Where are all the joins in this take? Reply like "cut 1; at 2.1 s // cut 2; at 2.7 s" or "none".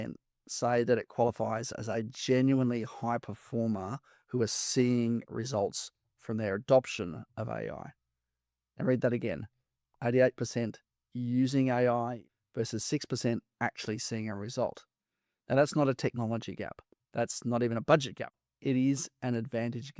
cut 1; at 12.3 s // cut 2; at 18.3 s